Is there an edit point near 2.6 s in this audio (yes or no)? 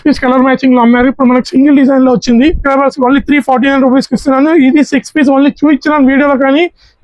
yes